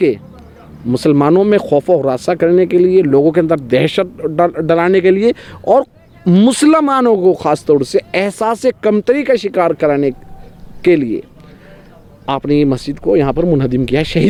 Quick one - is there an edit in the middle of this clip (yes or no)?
no